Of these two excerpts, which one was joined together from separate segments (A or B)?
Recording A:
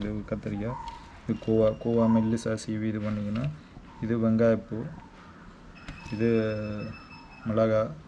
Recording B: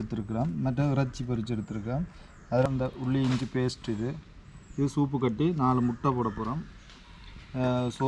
B